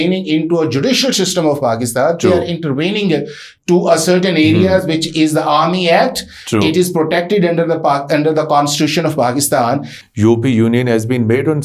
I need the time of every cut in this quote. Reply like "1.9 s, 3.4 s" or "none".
10.0 s